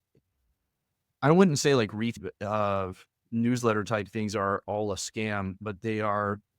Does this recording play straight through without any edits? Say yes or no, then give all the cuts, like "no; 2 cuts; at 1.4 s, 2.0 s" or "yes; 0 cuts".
no; 1 cut; at 2.2 s